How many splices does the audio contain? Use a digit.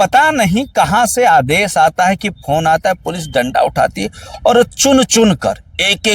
0